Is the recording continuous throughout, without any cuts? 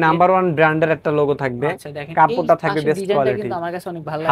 yes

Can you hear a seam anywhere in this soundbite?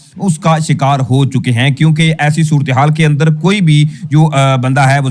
no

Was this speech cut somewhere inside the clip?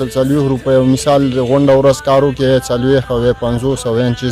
no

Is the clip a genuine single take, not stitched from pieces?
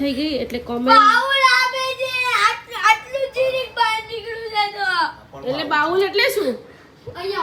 yes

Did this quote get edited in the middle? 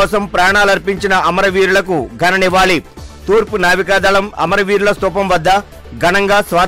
no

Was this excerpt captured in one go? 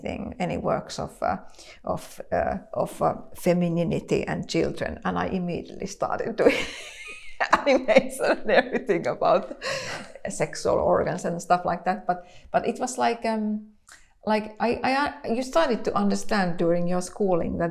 yes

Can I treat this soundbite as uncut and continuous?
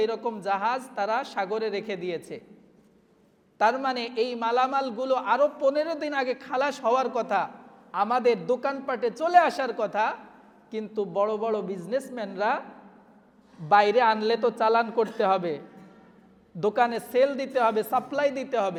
yes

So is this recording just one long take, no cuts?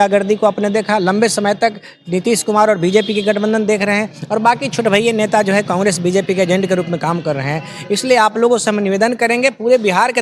yes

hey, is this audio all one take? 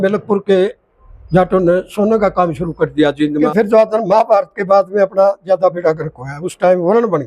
no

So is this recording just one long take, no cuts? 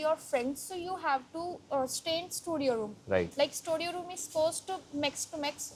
yes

